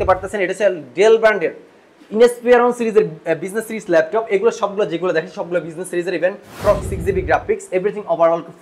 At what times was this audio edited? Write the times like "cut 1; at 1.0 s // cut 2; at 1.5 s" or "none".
cut 1; at 6.9 s